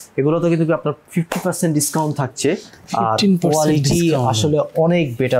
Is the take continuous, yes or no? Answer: yes